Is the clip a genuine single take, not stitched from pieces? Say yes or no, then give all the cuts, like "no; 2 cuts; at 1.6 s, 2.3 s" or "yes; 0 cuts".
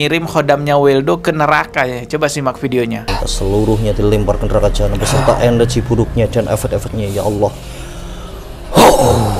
no; 1 cut; at 3.1 s